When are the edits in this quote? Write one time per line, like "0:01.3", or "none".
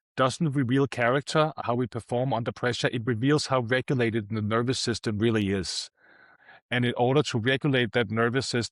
0:01.6
0:06.4